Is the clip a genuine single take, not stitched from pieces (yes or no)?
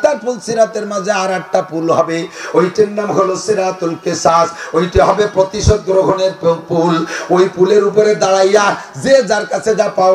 yes